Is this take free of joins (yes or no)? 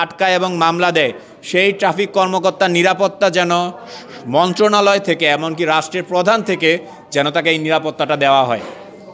yes